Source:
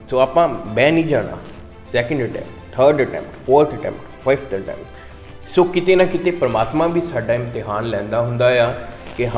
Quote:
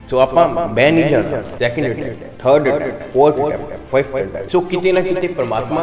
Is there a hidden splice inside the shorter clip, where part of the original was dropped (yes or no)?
yes